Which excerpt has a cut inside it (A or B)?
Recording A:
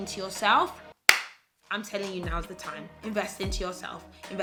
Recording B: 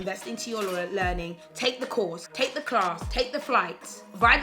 B